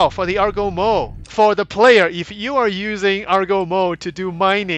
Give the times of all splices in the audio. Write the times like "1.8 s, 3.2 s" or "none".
1.2 s